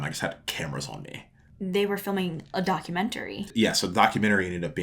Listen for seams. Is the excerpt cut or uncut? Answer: cut